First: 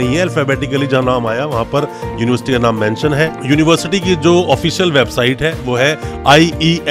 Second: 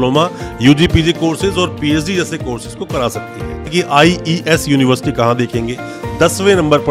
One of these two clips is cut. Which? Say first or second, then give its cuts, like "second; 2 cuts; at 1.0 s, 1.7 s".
second; 1 cut; at 3.7 s